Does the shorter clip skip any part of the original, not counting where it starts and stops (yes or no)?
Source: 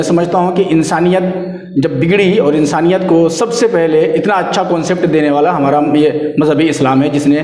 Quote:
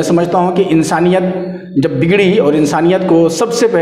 no